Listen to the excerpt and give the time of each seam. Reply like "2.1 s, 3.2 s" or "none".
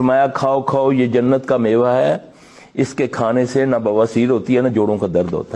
none